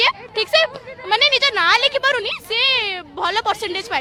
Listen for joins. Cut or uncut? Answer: uncut